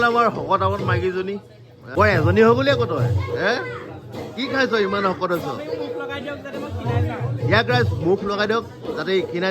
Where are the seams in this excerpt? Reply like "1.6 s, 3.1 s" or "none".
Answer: 1.9 s